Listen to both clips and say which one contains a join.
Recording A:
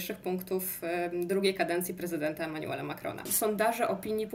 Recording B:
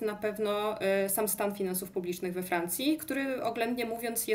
A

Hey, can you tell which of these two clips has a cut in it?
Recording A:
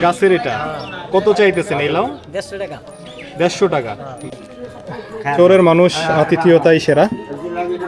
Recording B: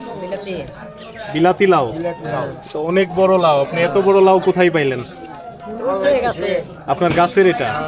A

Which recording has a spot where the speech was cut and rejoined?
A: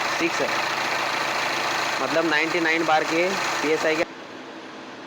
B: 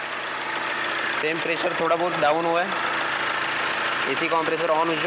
A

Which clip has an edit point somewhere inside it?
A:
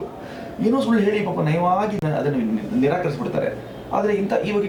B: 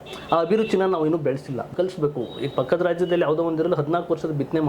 B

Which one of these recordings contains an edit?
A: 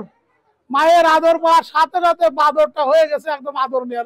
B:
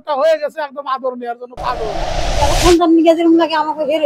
B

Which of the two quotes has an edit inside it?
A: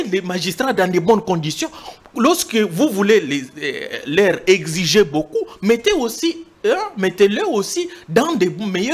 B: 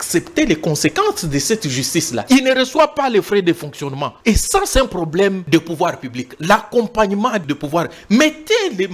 B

